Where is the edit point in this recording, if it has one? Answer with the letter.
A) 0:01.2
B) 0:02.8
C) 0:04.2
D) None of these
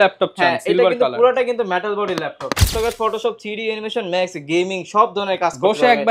B